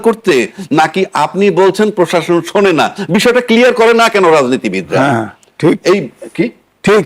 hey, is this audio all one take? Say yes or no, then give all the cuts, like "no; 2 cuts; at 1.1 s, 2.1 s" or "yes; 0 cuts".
yes; 0 cuts